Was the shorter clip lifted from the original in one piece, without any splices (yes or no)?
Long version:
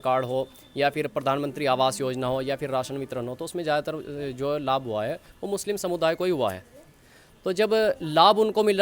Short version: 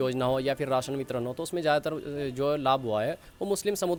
yes